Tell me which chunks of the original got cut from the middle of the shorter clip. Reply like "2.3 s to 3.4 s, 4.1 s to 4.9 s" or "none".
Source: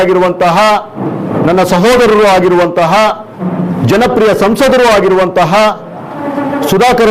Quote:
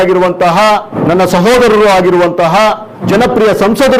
0.9 s to 1.3 s, 3.4 s to 3.8 s